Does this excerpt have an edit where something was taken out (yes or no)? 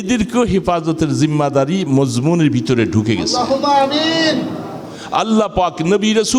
yes